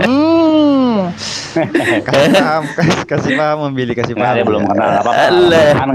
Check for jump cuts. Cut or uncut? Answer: uncut